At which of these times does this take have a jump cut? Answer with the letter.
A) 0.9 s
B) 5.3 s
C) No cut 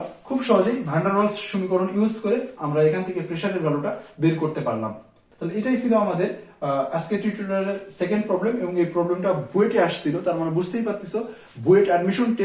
B